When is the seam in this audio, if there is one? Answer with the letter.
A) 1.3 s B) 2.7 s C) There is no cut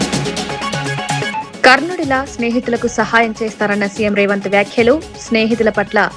C